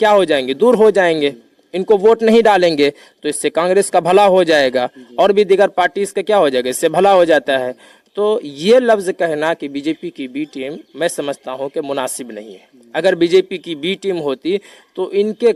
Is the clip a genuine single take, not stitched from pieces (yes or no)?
yes